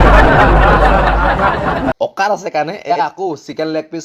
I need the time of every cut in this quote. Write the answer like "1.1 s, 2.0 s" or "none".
1.9 s